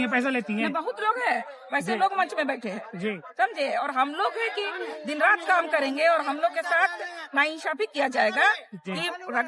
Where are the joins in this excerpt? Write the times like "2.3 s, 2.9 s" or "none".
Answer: none